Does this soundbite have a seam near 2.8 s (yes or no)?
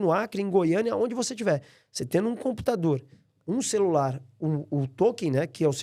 no